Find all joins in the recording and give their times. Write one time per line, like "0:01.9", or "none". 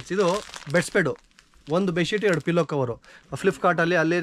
0:03.1

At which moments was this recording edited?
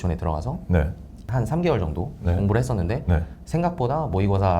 0:01.2

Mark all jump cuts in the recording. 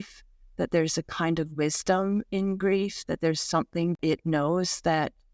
0:04.0

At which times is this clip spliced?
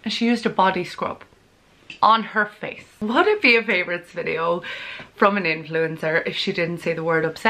0:02.9

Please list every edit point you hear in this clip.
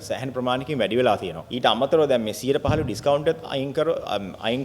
0:01.4

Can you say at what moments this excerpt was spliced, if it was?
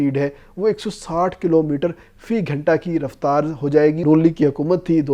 0:04.0

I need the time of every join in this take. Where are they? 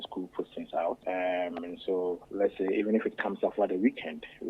0:01.0
0:02.2

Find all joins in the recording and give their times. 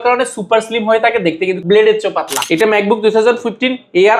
0:01.6
0:02.4

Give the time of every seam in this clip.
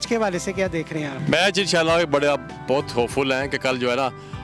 0:01.2

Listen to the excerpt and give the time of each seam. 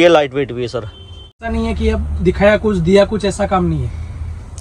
0:01.4

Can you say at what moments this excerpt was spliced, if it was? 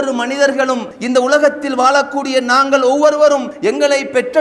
none

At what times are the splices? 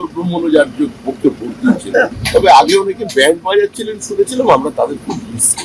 0:02.2

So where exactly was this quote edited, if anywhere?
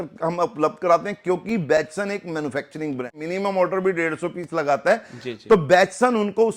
0:03.1

